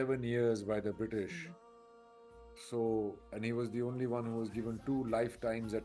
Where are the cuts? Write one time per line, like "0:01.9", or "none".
none